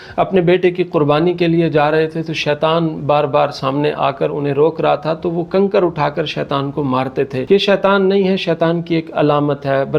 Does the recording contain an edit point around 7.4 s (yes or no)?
yes